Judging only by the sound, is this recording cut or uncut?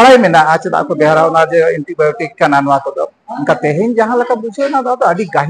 uncut